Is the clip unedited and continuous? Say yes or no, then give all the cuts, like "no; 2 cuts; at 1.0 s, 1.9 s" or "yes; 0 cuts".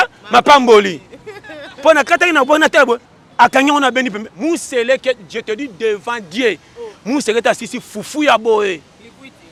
yes; 0 cuts